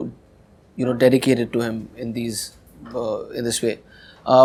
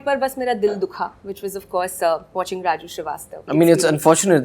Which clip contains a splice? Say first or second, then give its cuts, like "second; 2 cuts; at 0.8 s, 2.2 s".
second; 1 cut; at 3.3 s